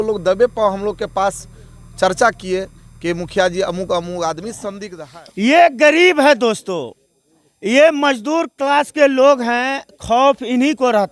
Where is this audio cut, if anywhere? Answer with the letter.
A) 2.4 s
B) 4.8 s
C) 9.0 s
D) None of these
B